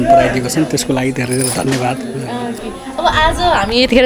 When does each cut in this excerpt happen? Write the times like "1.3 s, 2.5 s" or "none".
none